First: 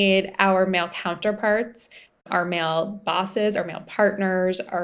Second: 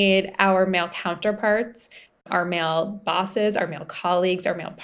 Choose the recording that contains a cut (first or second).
first